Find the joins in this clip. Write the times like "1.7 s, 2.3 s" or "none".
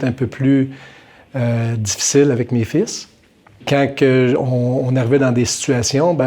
3.6 s